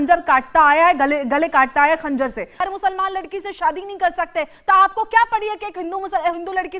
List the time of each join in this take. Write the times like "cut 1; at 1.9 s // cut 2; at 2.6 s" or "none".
cut 1; at 2.6 s